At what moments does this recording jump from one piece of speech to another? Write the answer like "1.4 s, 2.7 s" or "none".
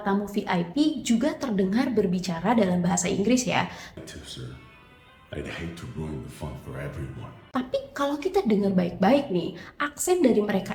none